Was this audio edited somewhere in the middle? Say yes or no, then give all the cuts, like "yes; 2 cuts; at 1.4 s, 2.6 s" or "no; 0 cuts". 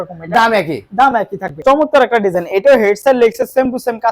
yes; 1 cut; at 1.6 s